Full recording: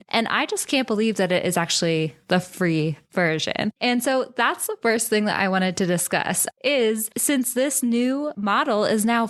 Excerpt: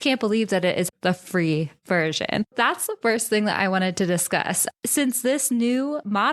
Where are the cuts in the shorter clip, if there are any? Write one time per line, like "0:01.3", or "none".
0:00.9
0:02.5
0:04.7